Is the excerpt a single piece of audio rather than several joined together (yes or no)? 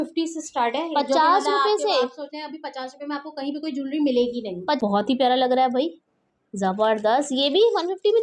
no